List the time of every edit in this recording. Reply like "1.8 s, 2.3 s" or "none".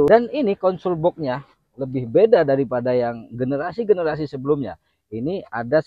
none